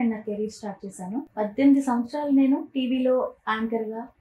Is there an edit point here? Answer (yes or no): yes